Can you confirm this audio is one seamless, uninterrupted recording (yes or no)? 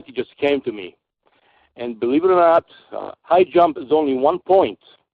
no